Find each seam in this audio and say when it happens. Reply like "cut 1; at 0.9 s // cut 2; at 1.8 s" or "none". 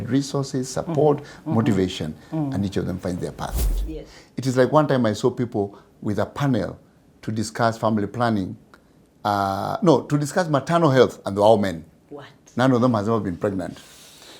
cut 1; at 3.7 s